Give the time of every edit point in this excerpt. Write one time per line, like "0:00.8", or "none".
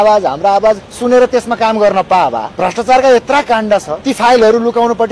0:00.9
0:02.5
0:04.0